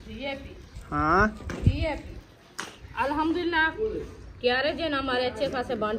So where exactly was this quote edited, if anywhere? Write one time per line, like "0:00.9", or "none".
0:02.8